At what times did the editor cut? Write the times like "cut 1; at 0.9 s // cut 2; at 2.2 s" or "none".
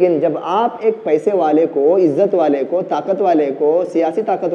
none

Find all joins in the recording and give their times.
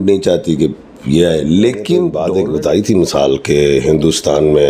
cut 1; at 2.2 s

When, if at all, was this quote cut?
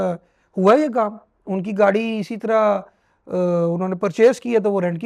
none

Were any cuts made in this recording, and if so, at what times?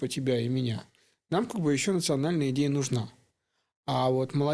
none

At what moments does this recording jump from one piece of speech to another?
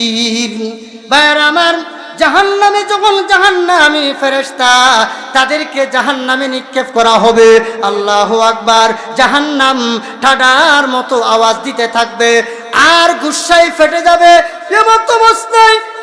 none

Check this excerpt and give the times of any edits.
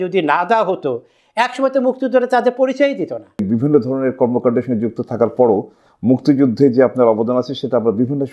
cut 1; at 3.4 s

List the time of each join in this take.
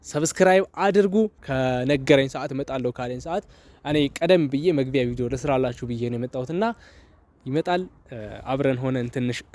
cut 1; at 1.4 s

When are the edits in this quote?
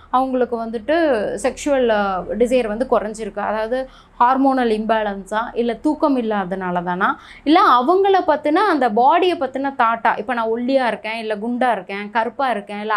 none

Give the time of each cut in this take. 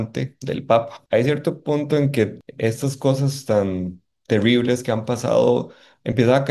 cut 1; at 1.0 s // cut 2; at 2.4 s

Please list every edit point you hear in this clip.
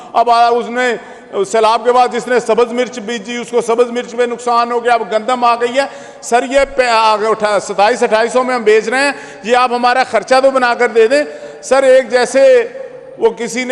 none

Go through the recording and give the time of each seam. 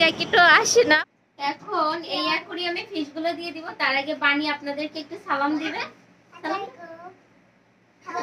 cut 1; at 1.0 s

